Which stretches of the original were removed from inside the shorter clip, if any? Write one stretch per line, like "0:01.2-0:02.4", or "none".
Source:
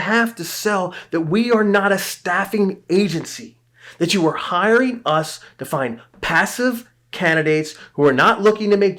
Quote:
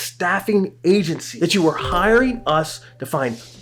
0:03.3-0:03.8